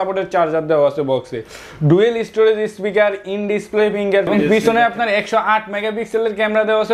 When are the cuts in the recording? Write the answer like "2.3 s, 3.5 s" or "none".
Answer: 4.3 s